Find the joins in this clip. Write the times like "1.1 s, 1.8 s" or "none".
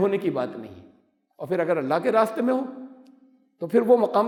none